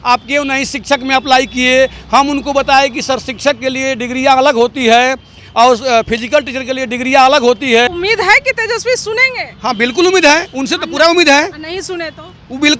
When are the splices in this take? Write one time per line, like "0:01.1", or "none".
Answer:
0:07.9

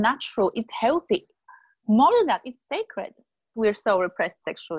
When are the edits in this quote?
0:03.5

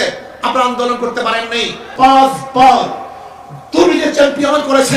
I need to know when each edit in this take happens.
0:01.9

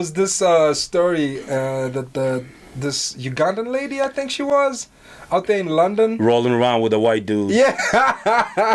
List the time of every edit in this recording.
none

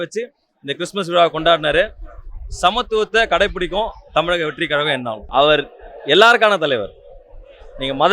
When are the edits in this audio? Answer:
0:05.2

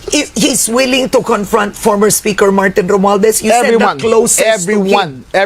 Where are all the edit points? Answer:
none

